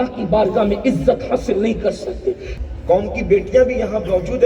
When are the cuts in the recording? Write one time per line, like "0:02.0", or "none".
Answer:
0:02.5